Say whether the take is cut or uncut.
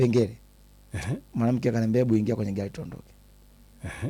uncut